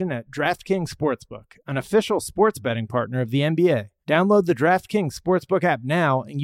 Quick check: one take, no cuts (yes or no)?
no